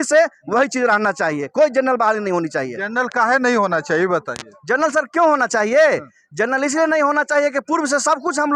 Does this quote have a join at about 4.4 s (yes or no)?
no